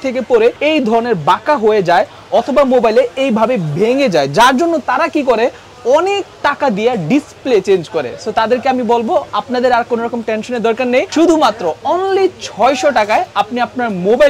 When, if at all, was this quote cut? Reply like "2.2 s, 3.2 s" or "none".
none